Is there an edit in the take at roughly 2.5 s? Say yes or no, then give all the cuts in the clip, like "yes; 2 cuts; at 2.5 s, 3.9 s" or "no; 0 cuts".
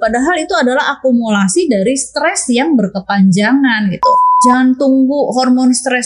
no; 1 cut; at 4.2 s